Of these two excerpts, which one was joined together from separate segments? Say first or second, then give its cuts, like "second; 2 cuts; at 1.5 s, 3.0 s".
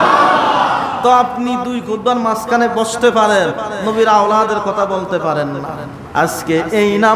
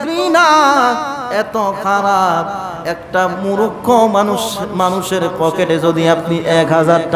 first; 1 cut; at 5.9 s